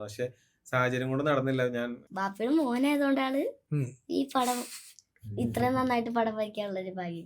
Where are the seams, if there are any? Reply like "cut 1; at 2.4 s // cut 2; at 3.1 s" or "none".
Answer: cut 1; at 2.0 s

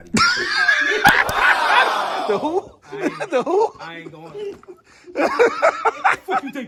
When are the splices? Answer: none

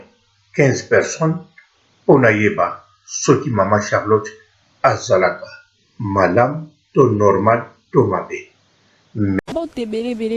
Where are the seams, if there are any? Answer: cut 1; at 9.4 s

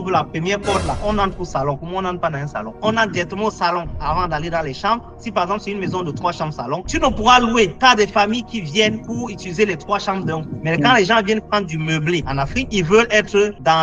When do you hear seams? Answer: cut 1; at 2.7 s // cut 2; at 10.5 s

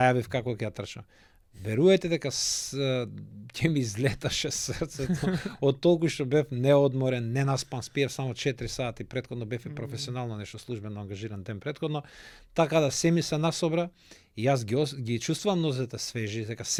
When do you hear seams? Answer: none

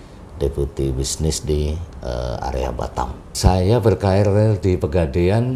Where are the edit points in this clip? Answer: cut 1; at 3.2 s

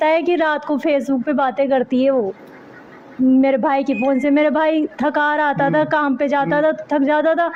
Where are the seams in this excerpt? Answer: none

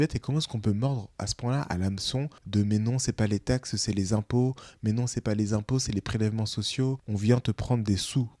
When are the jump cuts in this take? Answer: none

